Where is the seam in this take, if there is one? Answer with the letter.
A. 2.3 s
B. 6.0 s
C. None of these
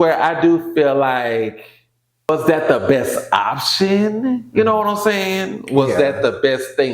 A